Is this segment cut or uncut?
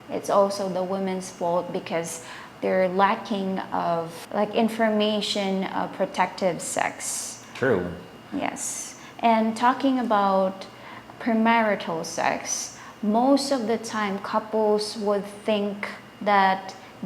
uncut